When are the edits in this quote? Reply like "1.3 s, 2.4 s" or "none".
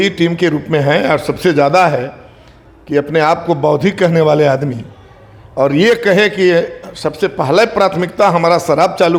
none